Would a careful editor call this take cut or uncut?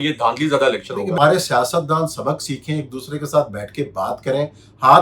cut